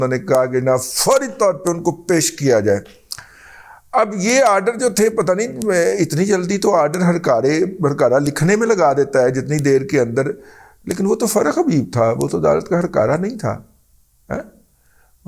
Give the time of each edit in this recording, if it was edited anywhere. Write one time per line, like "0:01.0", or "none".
none